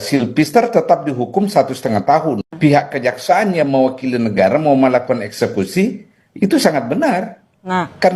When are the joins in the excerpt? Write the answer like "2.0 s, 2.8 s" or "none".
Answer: 2.5 s